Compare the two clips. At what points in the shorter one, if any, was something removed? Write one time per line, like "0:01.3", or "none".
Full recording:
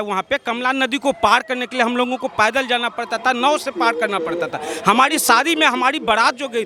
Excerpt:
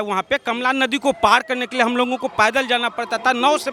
none